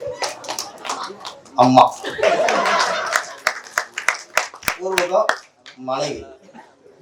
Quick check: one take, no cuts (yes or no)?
yes